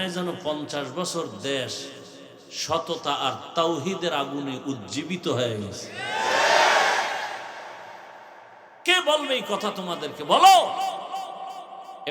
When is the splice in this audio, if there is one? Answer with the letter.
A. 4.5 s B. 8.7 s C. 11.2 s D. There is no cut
B